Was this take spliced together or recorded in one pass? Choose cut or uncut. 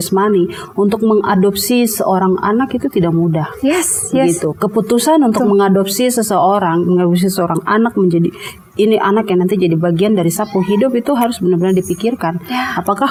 uncut